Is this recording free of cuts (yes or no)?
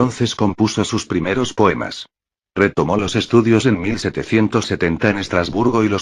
yes